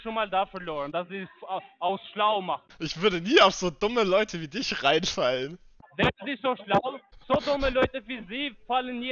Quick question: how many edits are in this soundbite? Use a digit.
2